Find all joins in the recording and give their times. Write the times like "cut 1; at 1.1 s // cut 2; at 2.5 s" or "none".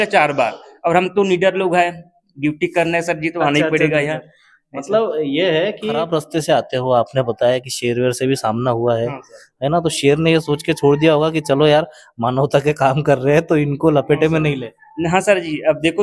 cut 1; at 6.1 s